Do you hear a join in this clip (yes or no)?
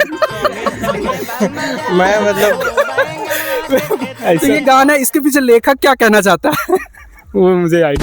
no